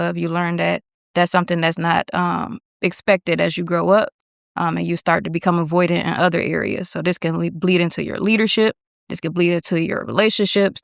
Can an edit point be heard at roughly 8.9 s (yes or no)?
no